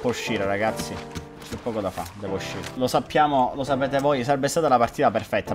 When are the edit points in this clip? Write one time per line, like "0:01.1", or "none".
0:02.6